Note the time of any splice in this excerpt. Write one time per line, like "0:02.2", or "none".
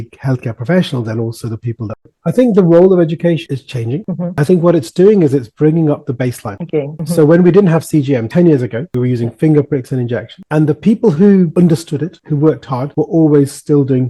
0:02.1